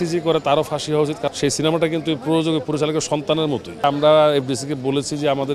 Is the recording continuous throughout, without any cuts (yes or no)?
no